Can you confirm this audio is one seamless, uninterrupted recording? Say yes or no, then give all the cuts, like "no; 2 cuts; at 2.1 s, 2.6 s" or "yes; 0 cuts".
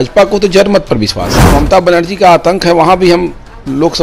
no; 1 cut; at 1.5 s